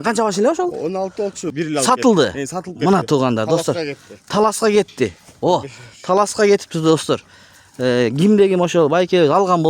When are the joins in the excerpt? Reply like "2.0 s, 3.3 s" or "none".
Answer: 1.5 s